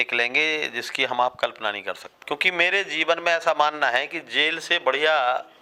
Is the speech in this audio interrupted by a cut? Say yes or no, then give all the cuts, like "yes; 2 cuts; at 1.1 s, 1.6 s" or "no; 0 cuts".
yes; 1 cut; at 2.1 s